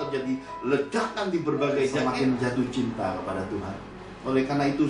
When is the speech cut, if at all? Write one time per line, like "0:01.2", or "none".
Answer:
0:02.2